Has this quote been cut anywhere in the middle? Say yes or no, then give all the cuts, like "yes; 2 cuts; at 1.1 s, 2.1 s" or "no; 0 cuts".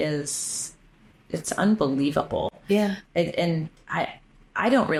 no; 0 cuts